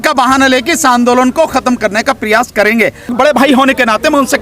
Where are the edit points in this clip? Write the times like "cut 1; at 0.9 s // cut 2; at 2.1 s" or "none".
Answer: cut 1; at 3.1 s